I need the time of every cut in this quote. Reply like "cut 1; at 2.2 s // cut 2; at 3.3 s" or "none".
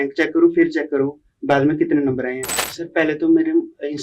cut 1; at 2.4 s